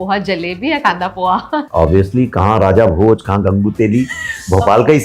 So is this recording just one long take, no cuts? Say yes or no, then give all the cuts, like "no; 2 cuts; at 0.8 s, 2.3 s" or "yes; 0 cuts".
yes; 0 cuts